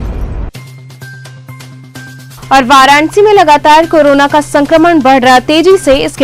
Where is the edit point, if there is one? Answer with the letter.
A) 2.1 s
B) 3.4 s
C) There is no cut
A